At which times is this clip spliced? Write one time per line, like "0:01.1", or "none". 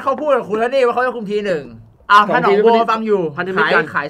0:01.9